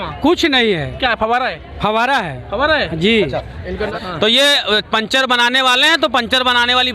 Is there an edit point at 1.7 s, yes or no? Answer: no